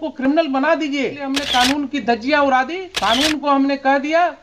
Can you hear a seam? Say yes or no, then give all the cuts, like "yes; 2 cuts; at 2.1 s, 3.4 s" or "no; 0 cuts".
yes; 2 cuts; at 1.4 s, 2.9 s